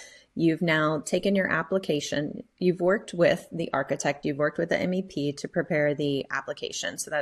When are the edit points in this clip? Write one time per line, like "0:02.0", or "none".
none